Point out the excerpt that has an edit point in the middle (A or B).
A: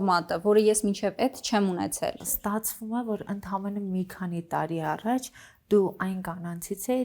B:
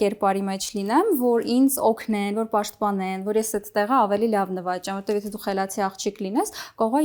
A